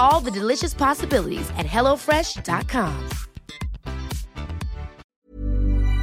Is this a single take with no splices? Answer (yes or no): no